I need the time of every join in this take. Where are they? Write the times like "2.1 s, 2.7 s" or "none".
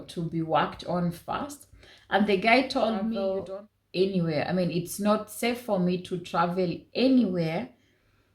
3.2 s